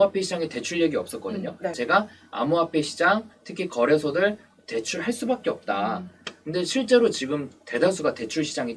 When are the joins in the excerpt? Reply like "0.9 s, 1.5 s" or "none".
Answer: 1.8 s

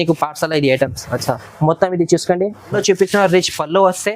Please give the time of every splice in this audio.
2.7 s

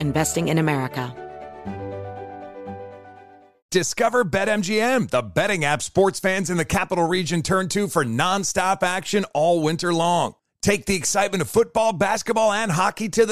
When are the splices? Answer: 1.1 s

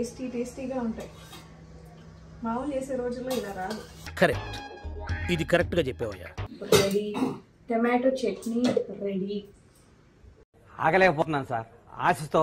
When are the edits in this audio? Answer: 4.0 s, 6.2 s

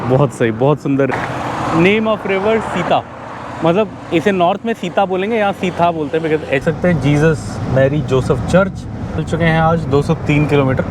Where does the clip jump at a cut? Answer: 1.1 s, 6.6 s, 9.2 s

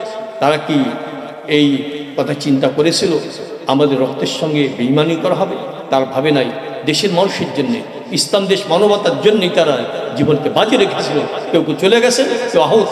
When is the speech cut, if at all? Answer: none

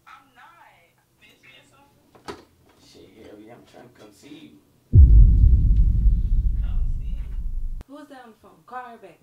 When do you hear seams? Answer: 1.2 s, 7.8 s

